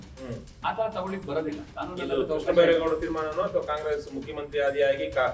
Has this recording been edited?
no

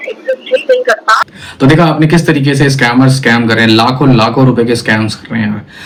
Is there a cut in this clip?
no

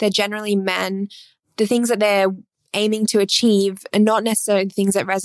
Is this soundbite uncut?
yes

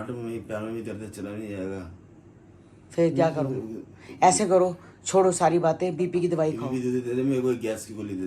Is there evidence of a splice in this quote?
no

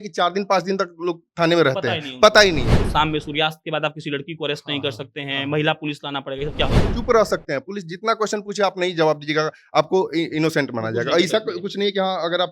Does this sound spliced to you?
yes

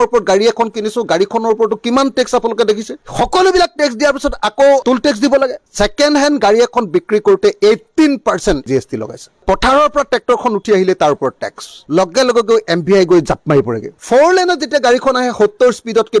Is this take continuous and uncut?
no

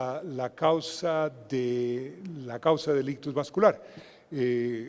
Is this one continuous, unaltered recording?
yes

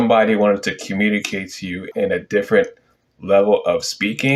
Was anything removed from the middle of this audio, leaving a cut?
yes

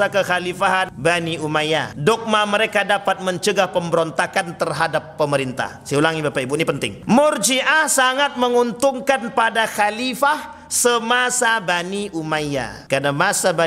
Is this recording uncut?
no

